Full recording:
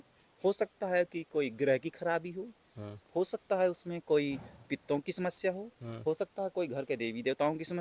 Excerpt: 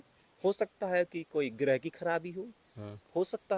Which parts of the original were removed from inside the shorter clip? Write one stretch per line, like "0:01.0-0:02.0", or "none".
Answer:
none